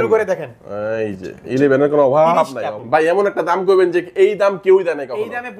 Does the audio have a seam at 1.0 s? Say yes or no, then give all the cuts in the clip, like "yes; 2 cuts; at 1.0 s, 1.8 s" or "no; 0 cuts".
no; 1 cut; at 2.7 s